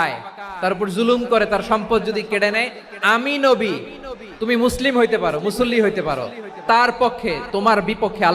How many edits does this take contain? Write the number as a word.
zero